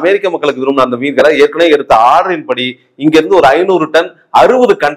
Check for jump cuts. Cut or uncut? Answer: uncut